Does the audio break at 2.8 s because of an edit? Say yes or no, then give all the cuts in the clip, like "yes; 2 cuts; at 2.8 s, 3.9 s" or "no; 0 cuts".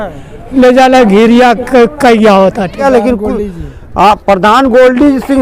yes; 1 cut; at 2.8 s